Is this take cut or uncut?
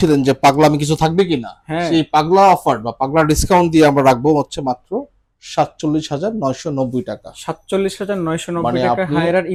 uncut